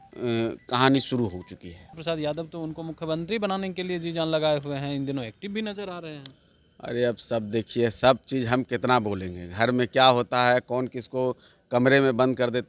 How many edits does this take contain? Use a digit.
1